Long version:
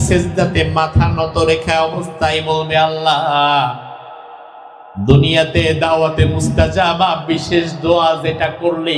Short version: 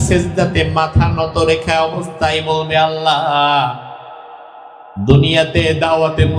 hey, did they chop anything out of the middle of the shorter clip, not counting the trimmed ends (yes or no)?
no